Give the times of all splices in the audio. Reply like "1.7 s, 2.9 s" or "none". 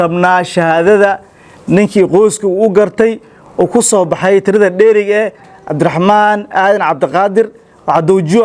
none